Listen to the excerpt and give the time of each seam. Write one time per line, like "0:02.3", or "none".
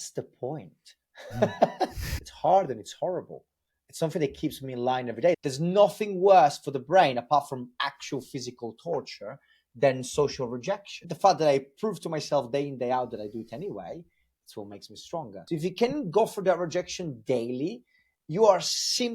0:02.1
0:05.4
0:11.0
0:15.3